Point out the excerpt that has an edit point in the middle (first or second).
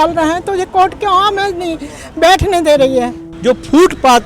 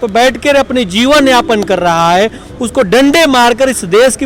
first